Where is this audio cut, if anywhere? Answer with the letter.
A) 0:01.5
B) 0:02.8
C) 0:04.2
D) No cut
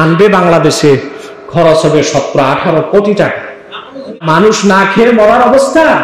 C